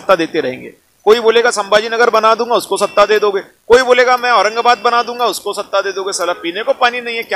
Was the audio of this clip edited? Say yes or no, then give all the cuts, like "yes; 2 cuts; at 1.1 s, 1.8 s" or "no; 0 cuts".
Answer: no; 0 cuts